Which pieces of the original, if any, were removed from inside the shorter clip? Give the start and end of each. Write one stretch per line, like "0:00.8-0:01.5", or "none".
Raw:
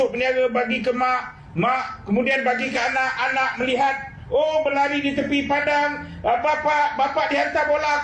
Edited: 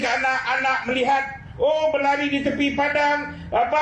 none